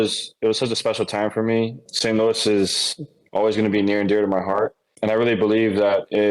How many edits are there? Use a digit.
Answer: 2